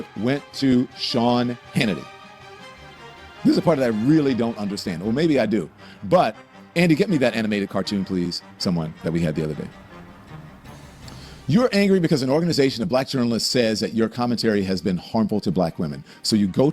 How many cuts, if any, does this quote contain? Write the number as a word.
zero